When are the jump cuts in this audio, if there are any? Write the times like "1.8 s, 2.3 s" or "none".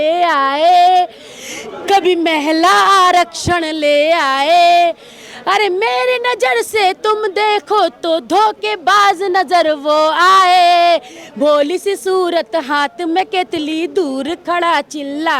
none